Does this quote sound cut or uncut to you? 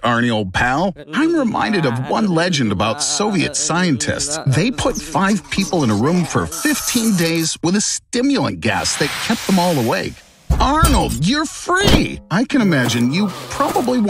uncut